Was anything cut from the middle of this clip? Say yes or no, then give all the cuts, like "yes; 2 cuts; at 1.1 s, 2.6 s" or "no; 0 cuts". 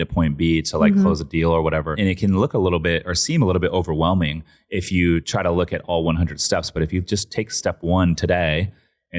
yes; 1 cut; at 1.9 s